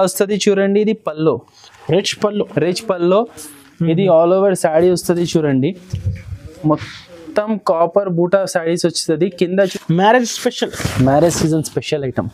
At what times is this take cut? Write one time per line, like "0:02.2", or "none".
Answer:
0:09.7